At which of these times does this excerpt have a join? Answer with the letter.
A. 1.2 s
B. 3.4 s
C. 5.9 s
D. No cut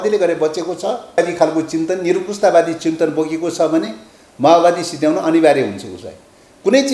A